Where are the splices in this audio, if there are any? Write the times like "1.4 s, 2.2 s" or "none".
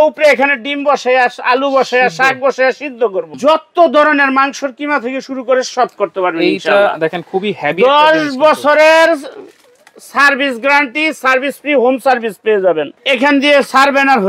3.3 s, 12.9 s